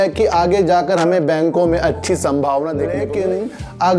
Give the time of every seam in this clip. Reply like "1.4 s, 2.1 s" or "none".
3.1 s